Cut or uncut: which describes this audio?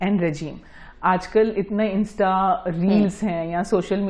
uncut